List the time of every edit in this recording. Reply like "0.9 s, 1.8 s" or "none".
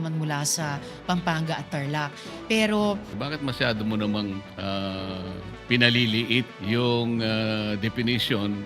3.1 s, 4.5 s, 5.5 s, 6.5 s